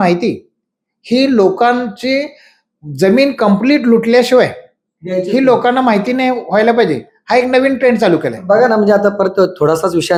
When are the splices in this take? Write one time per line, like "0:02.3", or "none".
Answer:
none